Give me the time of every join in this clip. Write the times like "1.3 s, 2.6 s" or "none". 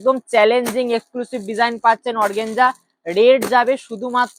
none